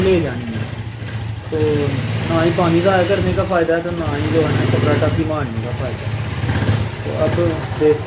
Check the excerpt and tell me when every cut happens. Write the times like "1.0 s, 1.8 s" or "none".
none